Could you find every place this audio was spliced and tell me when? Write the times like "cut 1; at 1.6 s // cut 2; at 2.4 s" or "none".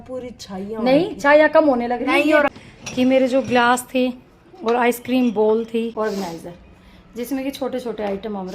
cut 1; at 2.5 s // cut 2; at 5.9 s